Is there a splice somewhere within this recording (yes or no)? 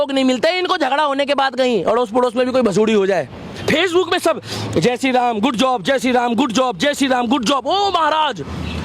yes